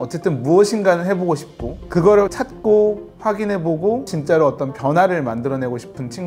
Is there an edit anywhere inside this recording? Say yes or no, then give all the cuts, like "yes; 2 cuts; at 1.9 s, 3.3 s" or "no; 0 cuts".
yes; 2 cuts; at 2.3 s, 4.1 s